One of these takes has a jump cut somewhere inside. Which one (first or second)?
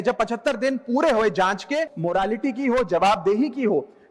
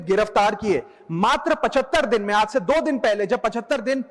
first